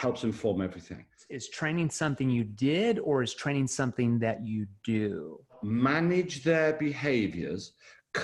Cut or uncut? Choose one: cut